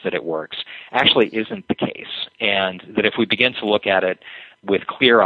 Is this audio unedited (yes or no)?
no